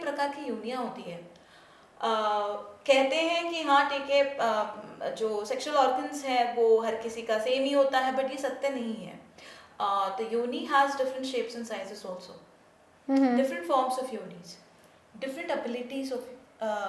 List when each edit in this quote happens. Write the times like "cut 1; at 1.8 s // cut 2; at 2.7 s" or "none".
none